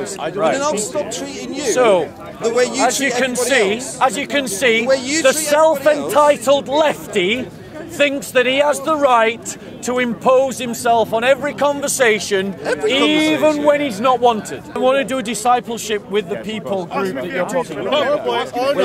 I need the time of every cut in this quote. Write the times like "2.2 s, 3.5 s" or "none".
14.8 s